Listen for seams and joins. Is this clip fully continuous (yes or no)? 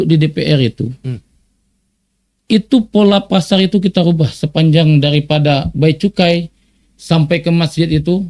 yes